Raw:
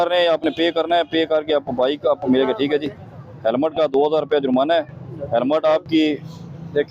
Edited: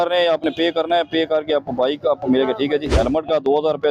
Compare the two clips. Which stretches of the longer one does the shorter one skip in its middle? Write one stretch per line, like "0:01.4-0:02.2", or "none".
0:02.9-0:03.4